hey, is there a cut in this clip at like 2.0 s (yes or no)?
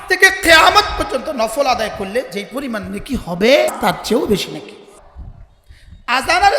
no